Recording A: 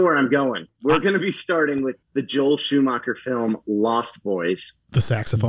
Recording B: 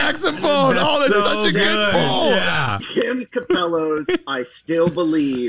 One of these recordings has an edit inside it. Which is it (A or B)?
B